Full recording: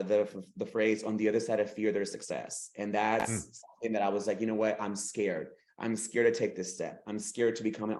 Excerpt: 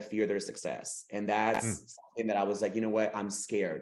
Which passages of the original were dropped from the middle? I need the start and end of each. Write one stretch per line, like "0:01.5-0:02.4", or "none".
none

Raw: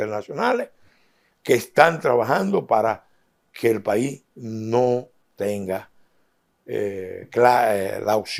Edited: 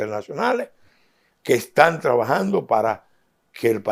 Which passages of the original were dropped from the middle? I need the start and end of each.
none

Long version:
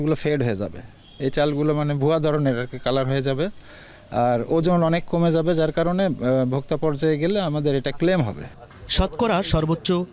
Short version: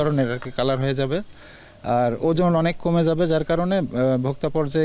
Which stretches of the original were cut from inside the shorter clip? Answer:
none

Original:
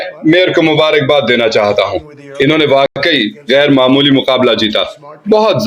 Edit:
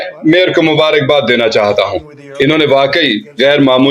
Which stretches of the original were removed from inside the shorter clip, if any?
0:02.9-0:03.0

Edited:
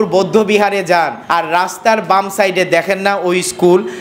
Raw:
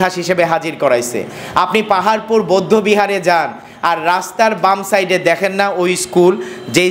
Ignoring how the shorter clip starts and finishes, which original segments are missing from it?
0:03.6-0:03.7

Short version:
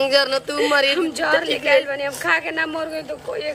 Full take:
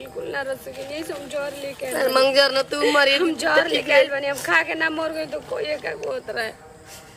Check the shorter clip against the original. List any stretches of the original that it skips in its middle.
none

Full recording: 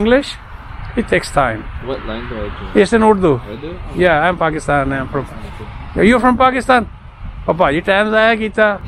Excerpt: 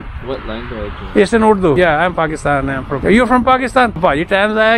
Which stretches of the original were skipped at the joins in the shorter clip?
0:03.4-0:04.0
0:05.2-0:05.9
0:06.9-0:07.6

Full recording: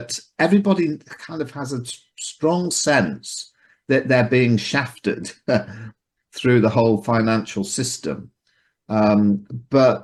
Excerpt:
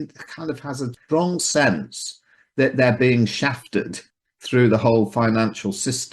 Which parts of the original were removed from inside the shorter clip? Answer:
0:01.8-0:02.2
0:05.3-0:05.9

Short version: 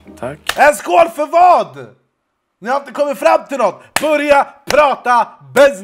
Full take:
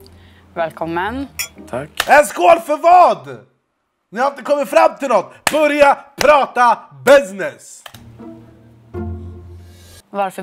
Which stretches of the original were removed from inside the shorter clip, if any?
none

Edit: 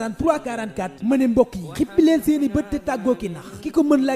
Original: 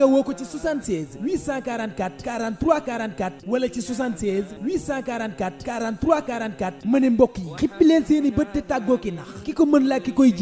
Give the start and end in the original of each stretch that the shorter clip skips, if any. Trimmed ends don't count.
0:03.3-0:06.8

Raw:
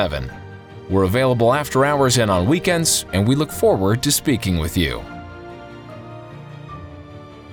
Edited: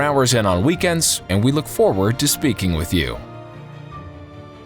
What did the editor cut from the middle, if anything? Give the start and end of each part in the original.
0:05.0-0:06.0

